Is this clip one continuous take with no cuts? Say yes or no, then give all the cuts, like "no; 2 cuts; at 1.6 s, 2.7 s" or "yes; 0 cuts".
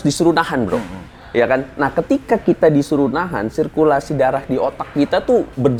yes; 0 cuts